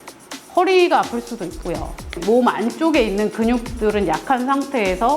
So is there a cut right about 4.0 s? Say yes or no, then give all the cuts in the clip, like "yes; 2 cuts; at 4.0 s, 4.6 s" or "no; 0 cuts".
no; 1 cut; at 2.2 s